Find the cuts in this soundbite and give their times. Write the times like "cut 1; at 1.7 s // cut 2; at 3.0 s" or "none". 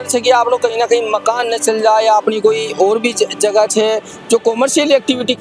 none